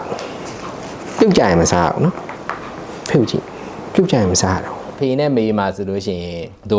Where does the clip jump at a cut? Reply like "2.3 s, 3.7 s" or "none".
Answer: 4.9 s